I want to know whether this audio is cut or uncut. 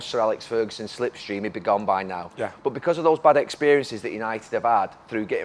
uncut